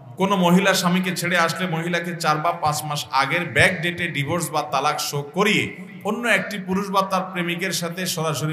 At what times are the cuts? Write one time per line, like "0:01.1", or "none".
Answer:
none